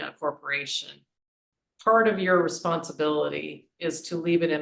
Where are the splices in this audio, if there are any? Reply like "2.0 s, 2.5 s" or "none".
1.1 s